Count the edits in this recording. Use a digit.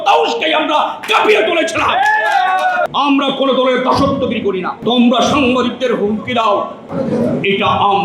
3